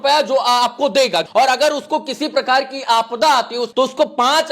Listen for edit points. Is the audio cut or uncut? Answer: cut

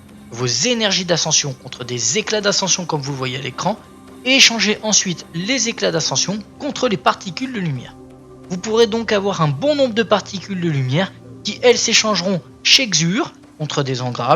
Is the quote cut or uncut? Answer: cut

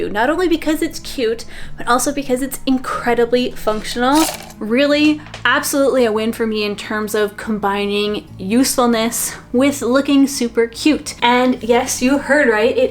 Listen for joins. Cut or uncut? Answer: cut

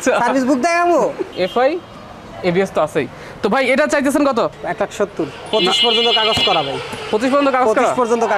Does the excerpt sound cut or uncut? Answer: cut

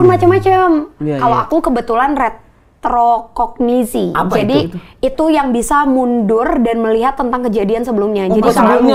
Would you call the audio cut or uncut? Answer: uncut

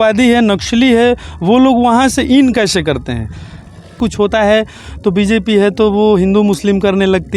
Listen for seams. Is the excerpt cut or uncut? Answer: cut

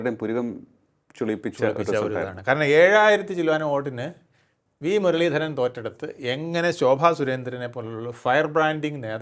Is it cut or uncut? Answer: uncut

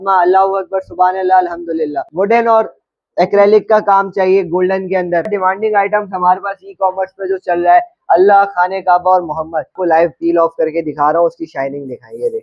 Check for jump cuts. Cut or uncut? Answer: cut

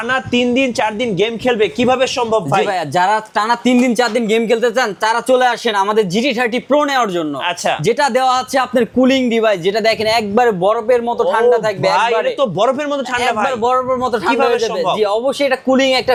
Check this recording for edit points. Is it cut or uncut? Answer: uncut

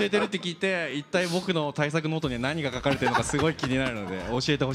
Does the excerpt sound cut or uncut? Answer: uncut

